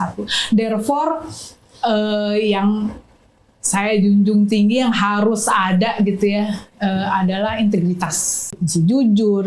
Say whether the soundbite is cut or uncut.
cut